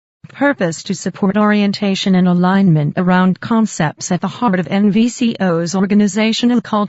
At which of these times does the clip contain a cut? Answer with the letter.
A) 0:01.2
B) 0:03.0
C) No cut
A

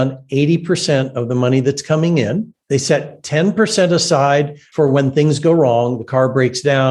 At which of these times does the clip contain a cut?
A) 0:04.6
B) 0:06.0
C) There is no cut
A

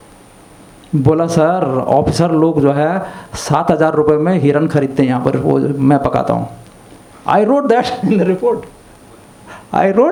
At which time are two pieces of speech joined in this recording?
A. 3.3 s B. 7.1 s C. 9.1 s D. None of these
D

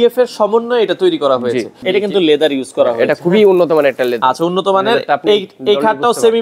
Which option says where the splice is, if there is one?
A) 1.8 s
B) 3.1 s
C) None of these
A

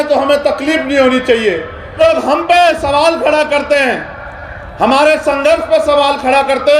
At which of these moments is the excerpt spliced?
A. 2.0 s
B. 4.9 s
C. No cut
A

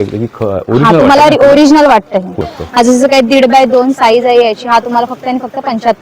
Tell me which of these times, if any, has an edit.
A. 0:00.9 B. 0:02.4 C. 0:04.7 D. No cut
B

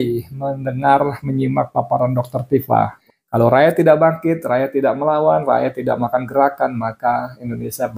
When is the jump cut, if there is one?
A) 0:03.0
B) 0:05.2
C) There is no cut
A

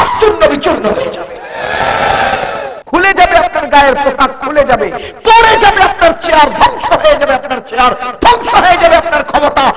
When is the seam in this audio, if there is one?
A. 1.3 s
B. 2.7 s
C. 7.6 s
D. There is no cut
B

